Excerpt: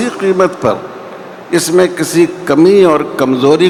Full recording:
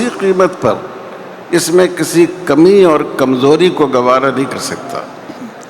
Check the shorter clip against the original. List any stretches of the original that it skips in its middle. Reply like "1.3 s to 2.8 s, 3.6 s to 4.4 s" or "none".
none